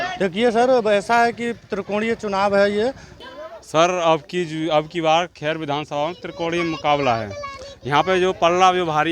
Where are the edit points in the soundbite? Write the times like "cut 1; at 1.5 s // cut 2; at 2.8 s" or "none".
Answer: cut 1; at 3.1 s